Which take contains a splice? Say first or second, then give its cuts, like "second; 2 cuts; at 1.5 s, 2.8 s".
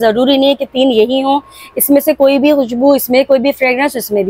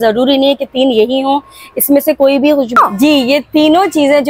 second; 1 cut; at 2.7 s